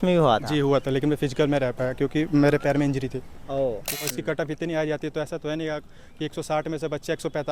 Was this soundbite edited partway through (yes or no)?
yes